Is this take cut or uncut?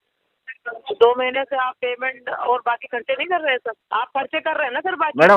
cut